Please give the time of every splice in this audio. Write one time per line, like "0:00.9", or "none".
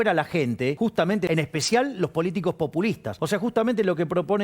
0:01.1
0:03.1

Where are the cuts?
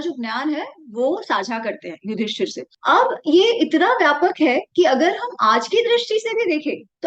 none

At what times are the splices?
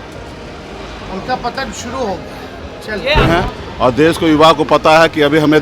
0:03.3

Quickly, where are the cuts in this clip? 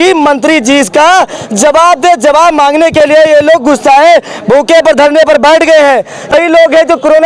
0:06.3

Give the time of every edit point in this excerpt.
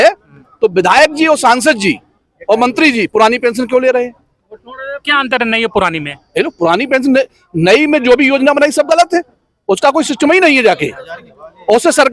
none

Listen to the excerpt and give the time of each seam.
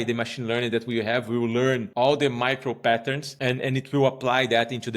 0:01.9
0:03.2

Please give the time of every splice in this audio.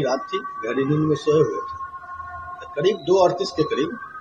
none

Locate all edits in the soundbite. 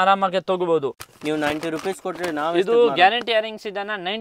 0:01.1

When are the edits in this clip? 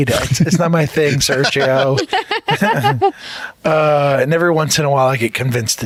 none

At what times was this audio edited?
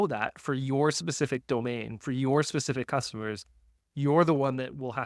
none

